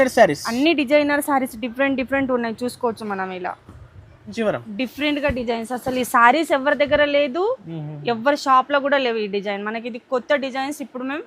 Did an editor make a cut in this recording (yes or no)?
yes